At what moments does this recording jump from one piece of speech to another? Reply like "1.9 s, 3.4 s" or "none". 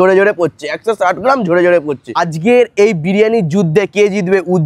2.3 s